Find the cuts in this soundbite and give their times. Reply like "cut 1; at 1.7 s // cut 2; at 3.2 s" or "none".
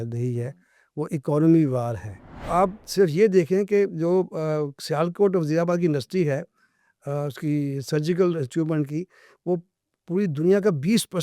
cut 1; at 2.4 s